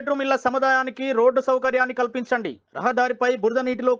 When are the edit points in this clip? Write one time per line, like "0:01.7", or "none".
none